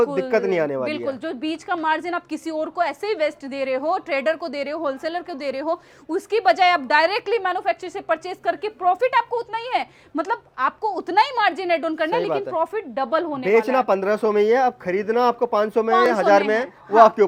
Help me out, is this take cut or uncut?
uncut